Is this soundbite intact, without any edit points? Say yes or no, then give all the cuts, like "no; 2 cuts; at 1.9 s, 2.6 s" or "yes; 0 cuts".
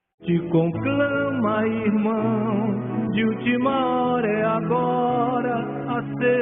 yes; 0 cuts